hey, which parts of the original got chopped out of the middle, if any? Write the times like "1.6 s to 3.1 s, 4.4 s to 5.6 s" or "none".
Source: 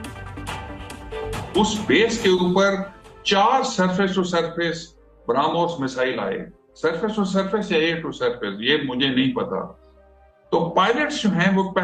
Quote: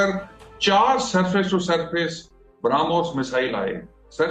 none